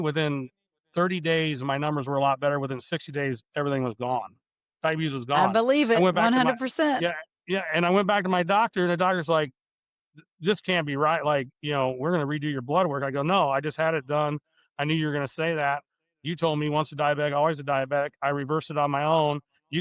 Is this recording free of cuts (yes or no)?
yes